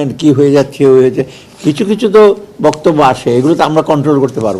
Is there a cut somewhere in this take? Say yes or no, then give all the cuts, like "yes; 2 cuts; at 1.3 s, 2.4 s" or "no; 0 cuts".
no; 0 cuts